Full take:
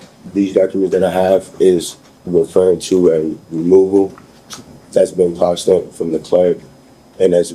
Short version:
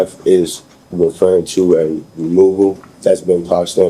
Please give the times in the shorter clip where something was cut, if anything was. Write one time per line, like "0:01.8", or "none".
0:02.9